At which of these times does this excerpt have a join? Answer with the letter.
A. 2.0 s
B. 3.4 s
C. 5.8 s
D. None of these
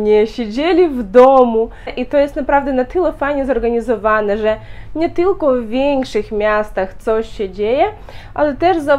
A